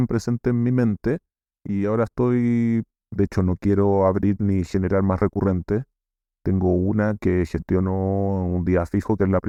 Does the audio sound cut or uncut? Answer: uncut